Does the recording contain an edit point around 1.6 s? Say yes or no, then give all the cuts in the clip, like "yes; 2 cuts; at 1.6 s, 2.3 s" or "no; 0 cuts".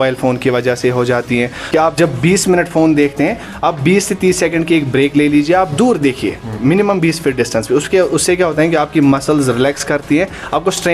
yes; 1 cut; at 1.6 s